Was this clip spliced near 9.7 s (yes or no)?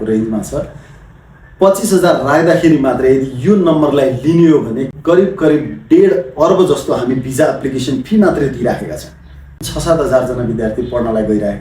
yes